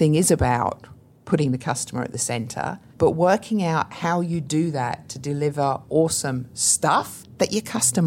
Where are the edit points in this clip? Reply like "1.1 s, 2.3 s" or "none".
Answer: 2.8 s, 7.1 s